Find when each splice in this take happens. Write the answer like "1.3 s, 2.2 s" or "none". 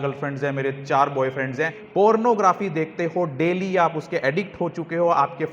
2.0 s